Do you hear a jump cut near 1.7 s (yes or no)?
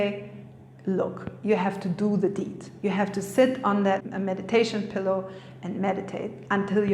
no